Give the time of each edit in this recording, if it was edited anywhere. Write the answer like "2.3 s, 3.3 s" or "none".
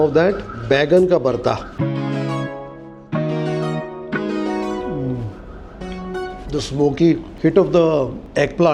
none

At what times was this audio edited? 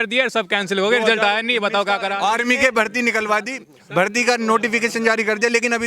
2.1 s

